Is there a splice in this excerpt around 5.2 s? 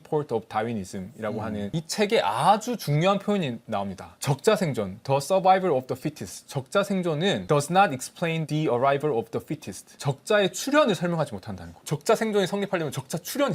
no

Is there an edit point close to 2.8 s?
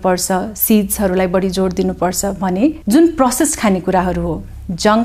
yes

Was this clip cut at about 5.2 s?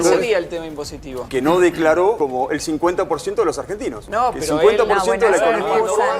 no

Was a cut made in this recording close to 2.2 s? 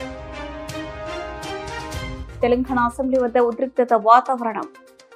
yes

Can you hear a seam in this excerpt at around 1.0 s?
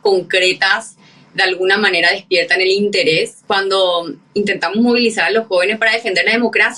no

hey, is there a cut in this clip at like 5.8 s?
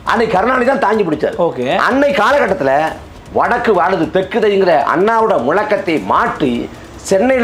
no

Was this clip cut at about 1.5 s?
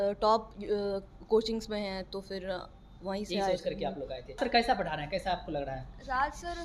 no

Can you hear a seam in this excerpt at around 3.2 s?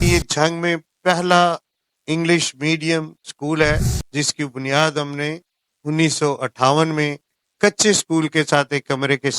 yes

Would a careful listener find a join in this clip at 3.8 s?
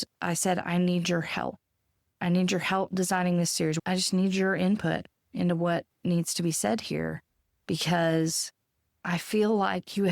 yes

